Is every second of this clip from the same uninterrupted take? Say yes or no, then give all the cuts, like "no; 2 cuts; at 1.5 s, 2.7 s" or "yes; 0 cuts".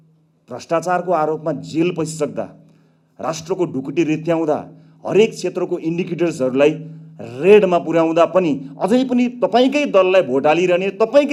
yes; 0 cuts